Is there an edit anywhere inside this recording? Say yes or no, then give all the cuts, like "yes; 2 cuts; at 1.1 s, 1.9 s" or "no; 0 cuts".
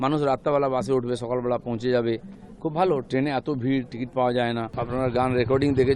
yes; 1 cut; at 4.7 s